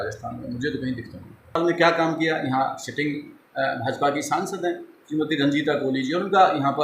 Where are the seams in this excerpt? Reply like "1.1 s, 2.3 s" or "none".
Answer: 1.6 s